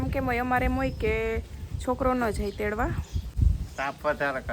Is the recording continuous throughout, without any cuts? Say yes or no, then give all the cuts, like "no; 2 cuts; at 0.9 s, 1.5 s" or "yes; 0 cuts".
no; 1 cut; at 3.3 s